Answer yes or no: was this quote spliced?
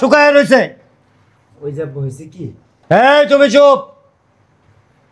no